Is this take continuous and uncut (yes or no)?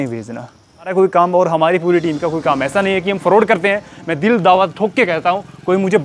no